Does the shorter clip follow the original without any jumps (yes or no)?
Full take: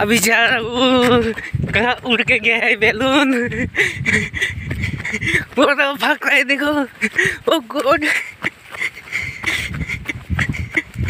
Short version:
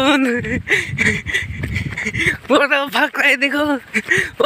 yes